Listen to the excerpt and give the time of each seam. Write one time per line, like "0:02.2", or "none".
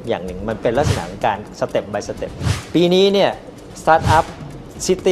0:02.6

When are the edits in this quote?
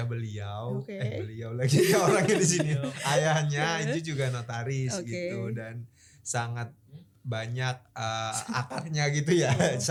none

